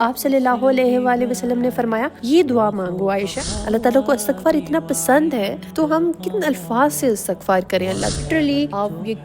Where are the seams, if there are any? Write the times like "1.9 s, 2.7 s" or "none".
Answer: 3.4 s, 8.2 s

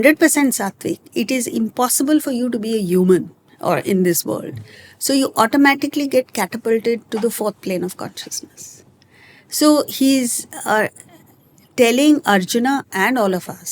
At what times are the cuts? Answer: none

